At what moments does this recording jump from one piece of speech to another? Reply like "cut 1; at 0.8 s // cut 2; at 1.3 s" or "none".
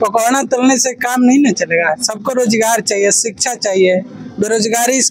none

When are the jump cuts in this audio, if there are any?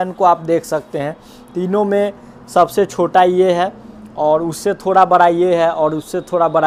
none

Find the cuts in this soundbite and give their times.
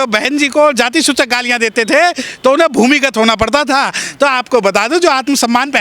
none

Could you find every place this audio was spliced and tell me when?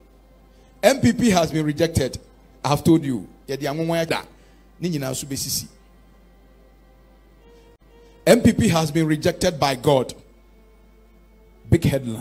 cut 1; at 4.1 s

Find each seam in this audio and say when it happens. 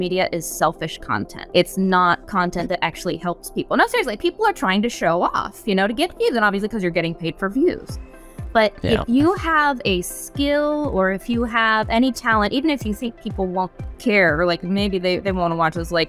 cut 1; at 1.3 s

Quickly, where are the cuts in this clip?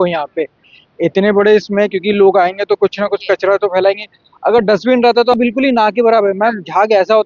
cut 1; at 5.3 s

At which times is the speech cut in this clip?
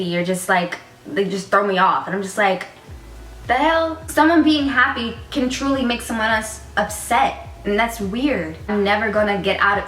cut 1; at 4.0 s // cut 2; at 8.7 s

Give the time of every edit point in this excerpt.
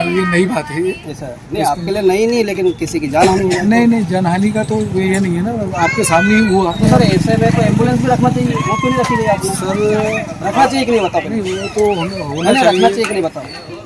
cut 1; at 6.8 s

